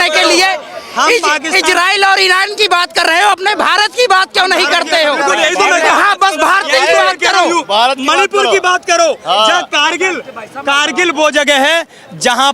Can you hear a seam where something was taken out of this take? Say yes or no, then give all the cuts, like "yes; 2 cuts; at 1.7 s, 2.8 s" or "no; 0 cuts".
no; 0 cuts